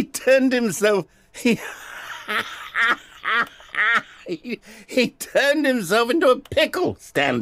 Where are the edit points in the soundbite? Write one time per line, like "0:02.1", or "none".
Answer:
none

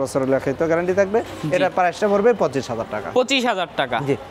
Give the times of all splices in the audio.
none

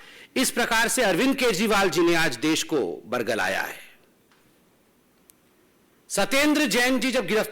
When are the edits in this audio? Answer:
0:04.4

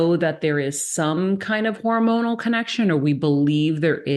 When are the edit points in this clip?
none

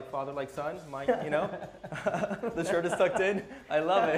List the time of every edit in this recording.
none

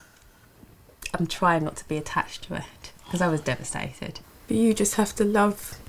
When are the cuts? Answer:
0:04.1

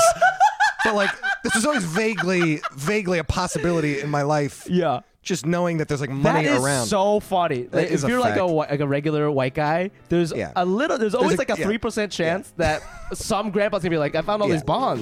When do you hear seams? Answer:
0:14.1

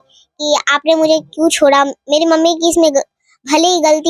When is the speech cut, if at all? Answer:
none

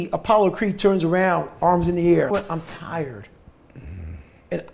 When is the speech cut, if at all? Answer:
0:02.3

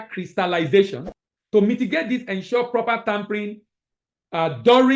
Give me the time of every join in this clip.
0:01.5

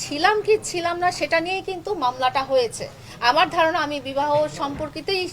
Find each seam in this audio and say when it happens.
none

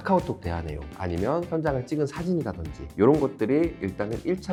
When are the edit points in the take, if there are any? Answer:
none

